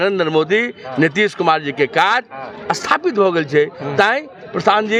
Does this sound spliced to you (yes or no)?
no